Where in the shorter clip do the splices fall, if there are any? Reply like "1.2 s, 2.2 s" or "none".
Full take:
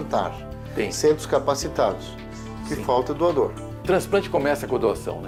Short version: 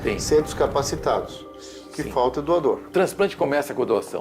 2.8 s